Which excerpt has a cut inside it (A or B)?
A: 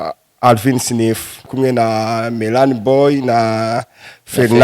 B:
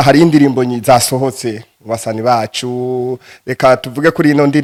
A